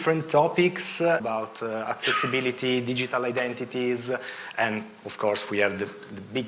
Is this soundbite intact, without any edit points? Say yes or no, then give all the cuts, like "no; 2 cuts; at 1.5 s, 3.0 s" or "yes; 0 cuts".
no; 1 cut; at 1.2 s